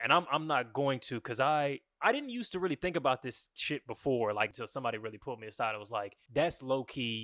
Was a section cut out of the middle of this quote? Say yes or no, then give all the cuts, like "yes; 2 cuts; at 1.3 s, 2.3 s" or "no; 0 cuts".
yes; 2 cuts; at 4.5 s, 6.2 s